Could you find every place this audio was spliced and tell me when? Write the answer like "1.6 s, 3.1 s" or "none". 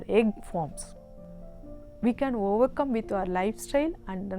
1.5 s